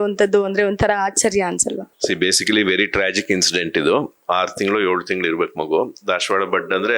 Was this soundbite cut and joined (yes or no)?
no